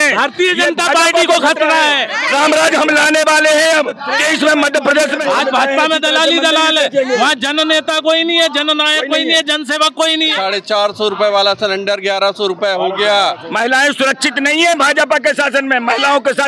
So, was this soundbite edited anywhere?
yes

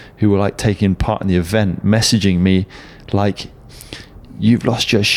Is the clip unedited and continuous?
yes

